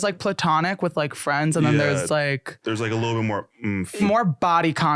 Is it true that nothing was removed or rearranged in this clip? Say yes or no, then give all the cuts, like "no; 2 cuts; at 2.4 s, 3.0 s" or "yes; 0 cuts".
no; 1 cut; at 4.0 s